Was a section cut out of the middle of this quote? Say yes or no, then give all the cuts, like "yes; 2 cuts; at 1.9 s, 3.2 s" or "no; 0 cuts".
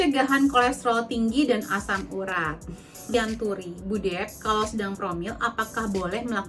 yes; 1 cut; at 3.1 s